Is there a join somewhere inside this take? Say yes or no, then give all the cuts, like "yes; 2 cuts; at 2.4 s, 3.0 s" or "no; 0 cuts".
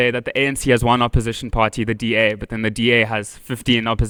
no; 0 cuts